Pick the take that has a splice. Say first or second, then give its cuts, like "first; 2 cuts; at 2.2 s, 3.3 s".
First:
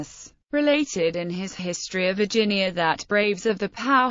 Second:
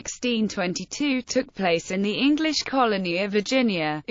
first; 1 cut; at 3.1 s